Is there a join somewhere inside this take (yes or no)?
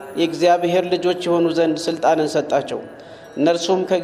no